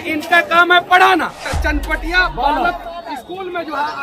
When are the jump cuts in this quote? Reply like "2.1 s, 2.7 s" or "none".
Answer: 1.5 s